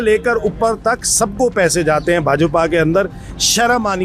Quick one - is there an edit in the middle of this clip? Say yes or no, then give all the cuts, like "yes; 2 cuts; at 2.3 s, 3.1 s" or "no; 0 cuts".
no; 0 cuts